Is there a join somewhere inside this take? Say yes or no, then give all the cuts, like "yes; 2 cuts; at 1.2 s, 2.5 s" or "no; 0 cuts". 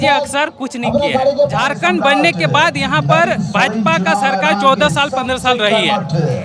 yes; 1 cut; at 1.5 s